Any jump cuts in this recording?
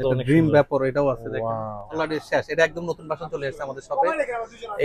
yes; 1 cut; at 1.9 s

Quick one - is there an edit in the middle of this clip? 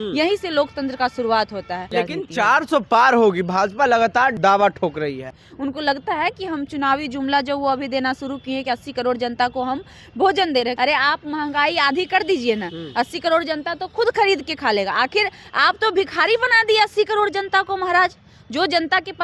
yes; 4 cuts; at 1.9 s, 4.4 s, 5.4 s, 10.8 s

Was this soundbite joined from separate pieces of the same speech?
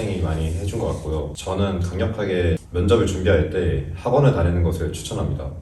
yes; 2 cuts; at 1.4 s, 2.7 s

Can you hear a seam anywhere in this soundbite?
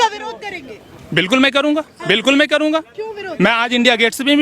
no; 0 cuts

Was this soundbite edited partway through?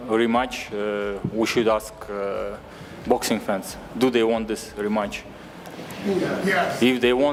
no; 0 cuts

